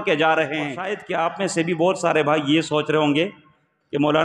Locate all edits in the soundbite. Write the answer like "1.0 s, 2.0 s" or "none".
0.9 s